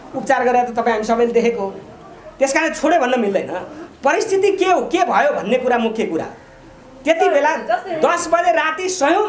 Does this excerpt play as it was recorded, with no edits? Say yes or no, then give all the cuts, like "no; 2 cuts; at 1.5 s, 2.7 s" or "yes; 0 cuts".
yes; 0 cuts